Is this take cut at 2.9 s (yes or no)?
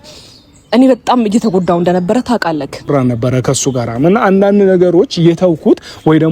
yes